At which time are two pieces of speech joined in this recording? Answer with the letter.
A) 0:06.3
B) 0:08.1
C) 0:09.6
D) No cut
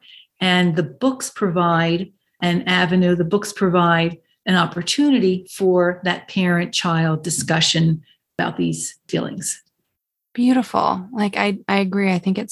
D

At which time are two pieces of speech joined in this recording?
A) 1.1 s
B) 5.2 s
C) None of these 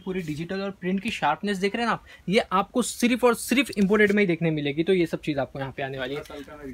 C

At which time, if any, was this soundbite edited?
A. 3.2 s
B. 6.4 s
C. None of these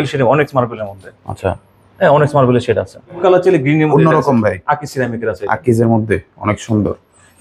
A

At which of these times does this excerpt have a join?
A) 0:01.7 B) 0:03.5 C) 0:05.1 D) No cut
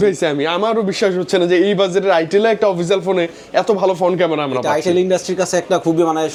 D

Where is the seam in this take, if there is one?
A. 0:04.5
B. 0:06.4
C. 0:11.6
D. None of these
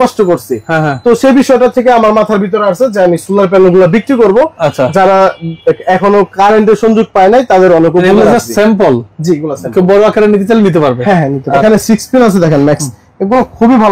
C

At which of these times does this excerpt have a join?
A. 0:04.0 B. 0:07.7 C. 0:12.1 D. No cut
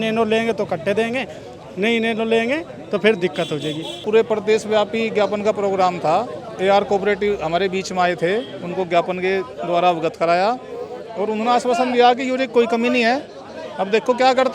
A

